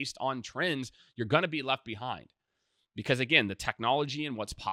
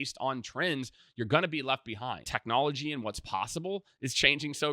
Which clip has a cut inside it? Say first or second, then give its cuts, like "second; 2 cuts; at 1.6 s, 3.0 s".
second; 1 cut; at 2.3 s